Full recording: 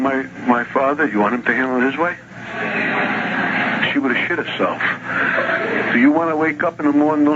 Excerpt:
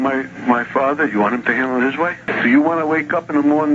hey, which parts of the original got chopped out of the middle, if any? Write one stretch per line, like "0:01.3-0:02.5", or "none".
0:02.3-0:05.8